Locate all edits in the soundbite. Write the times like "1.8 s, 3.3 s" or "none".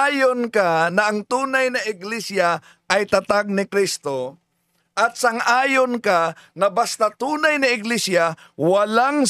none